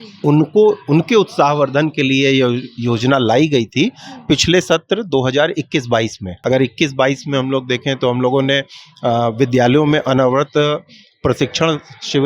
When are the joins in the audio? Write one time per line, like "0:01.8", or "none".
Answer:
0:06.3